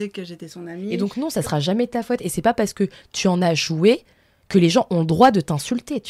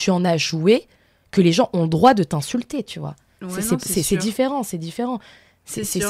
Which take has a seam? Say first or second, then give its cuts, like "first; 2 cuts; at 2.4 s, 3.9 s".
first; 1 cut; at 0.9 s